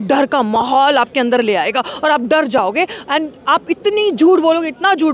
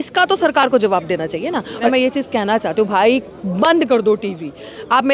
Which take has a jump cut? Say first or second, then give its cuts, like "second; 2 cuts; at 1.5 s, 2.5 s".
second; 1 cut; at 1.9 s